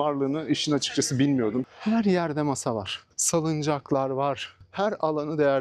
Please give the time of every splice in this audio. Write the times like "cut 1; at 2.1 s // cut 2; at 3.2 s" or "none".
cut 1; at 1.7 s